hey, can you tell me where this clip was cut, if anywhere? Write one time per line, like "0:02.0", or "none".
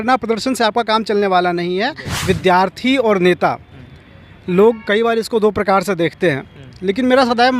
0:02.1